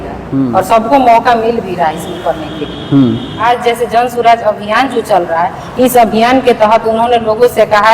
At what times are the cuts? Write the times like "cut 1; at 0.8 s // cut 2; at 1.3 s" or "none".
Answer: cut 1; at 3.4 s